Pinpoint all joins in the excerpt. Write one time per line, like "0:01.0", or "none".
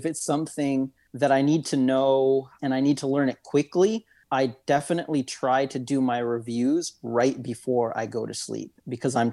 0:01.0
0:02.5
0:04.2